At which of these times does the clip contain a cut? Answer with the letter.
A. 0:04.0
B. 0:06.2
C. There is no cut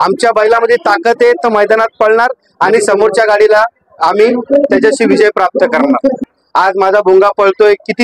B